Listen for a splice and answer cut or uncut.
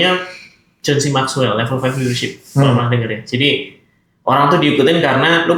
uncut